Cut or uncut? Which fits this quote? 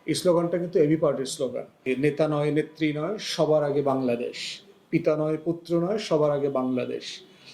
cut